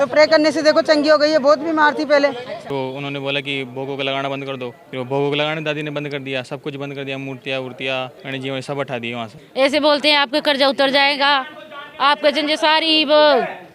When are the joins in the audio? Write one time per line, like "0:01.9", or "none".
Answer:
0:02.6
0:04.8
0:08.2
0:09.4